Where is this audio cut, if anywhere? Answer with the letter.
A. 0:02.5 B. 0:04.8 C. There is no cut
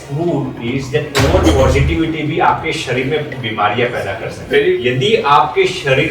B